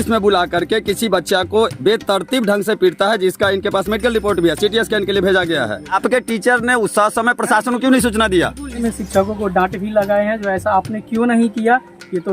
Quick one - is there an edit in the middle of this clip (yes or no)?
yes